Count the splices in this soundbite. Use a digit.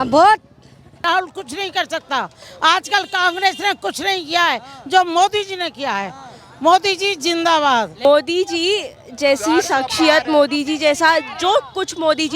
2